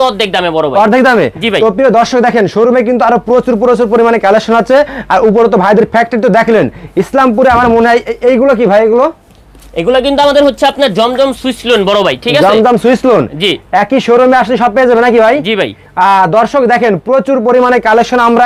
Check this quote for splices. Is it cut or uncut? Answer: uncut